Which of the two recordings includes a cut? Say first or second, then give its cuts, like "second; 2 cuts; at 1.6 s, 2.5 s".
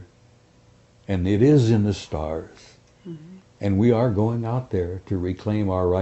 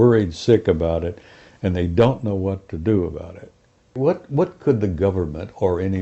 second; 1 cut; at 3.9 s